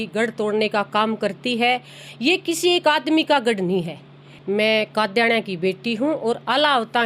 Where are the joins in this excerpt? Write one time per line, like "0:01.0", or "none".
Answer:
0:04.3